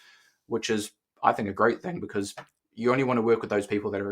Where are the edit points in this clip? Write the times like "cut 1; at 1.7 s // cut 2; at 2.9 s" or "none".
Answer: cut 1; at 2.6 s